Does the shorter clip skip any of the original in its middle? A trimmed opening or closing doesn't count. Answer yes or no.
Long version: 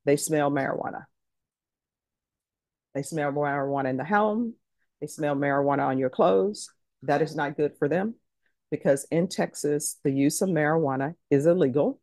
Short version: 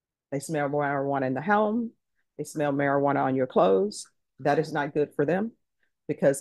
no